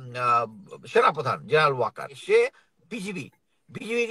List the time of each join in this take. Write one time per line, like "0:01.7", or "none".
0:02.2